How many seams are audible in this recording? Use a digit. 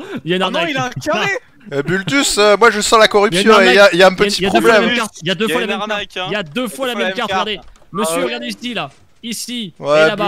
0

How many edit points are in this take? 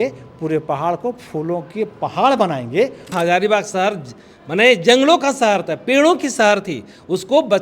1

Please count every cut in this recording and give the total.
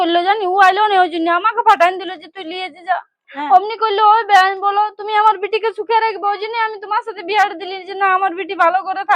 1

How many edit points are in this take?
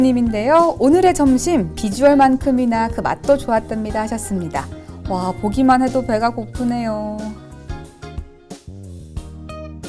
1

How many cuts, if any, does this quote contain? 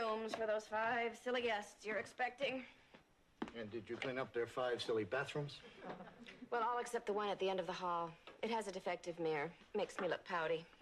1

